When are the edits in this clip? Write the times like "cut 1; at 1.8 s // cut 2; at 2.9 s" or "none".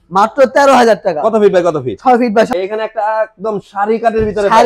cut 1; at 2.5 s